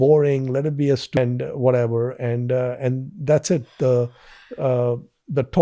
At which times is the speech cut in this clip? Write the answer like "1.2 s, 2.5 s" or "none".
1.2 s